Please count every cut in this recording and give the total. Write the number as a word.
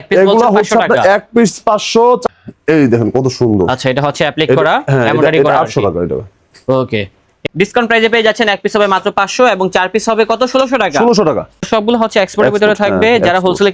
three